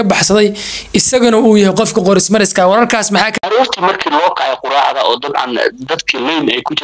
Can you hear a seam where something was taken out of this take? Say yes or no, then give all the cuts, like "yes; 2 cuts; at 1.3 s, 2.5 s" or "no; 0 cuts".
yes; 1 cut; at 3.3 s